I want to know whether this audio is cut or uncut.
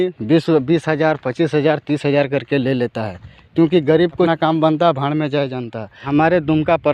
cut